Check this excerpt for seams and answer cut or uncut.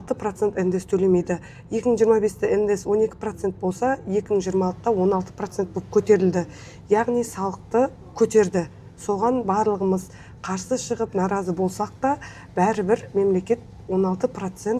uncut